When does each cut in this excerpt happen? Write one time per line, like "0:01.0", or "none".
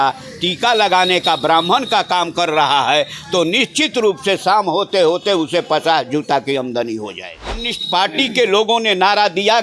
0:07.7